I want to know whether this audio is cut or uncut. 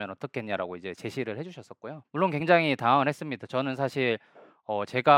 cut